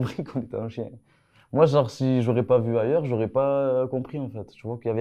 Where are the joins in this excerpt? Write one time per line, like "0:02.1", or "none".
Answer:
none